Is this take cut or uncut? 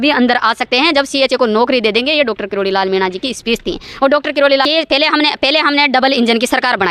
cut